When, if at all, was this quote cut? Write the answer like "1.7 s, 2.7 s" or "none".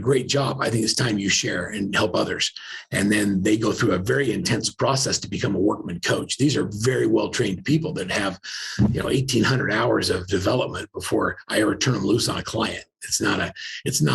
none